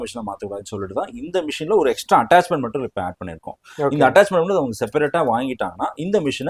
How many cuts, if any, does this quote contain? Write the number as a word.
zero